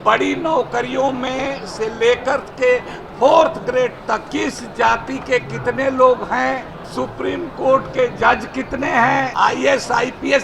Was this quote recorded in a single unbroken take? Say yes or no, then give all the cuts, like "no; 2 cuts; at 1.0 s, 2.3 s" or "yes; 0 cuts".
no; 3 cuts; at 4.2 s, 6.8 s, 9.3 s